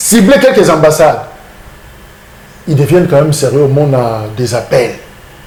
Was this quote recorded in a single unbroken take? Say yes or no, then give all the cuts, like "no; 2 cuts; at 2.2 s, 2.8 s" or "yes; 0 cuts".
yes; 0 cuts